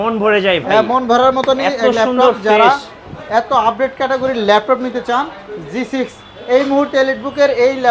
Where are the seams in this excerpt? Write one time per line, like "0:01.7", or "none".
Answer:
none